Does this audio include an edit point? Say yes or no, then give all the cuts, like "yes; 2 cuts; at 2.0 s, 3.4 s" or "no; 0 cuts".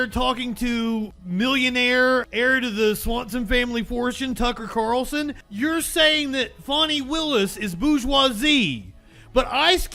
yes; 3 cuts; at 1.1 s, 2.3 s, 5.4 s